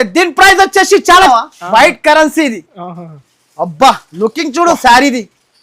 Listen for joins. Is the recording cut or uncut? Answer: cut